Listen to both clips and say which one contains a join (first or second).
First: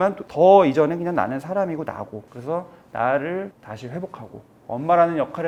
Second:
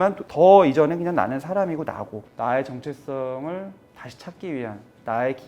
second